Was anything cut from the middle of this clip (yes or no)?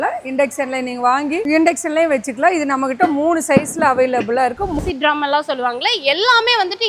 yes